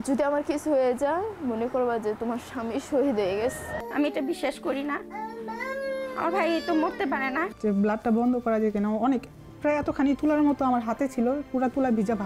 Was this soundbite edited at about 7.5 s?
yes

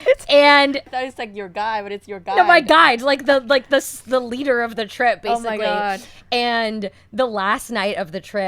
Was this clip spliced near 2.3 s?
no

